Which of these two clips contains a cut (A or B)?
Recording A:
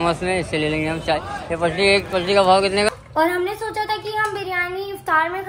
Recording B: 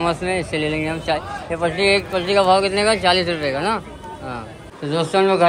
A